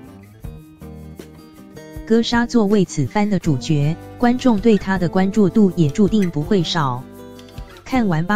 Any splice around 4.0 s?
no; 1 cut; at 2.1 s

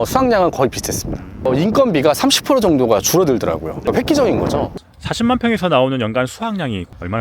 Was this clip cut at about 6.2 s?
no; 3 cuts; at 1.4 s, 3.8 s, 4.7 s

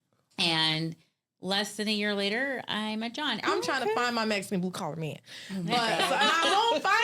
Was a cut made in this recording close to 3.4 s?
yes; 1 cut; at 3.4 s

